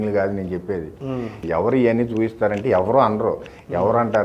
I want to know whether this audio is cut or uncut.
cut